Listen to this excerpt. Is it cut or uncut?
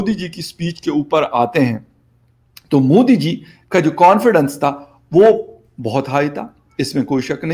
uncut